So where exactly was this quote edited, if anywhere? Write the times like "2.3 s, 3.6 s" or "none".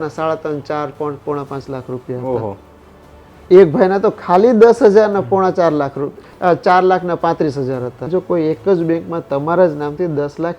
8.0 s